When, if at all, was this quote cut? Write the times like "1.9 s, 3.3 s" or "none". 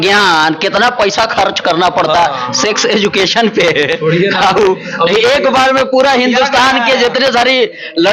none